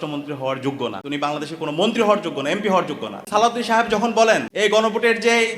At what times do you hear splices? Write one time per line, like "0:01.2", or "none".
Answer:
0:01.0
0:03.1
0:04.5